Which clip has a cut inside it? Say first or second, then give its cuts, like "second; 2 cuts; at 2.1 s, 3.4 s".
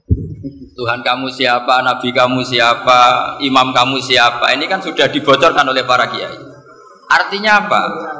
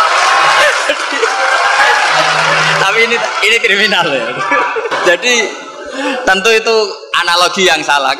second; 1 cut; at 4.9 s